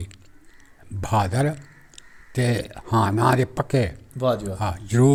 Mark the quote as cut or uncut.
uncut